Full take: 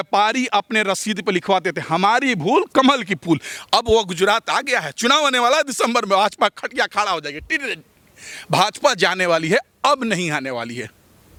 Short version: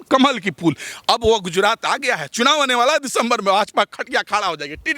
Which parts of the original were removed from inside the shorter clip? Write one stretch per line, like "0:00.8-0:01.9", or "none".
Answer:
none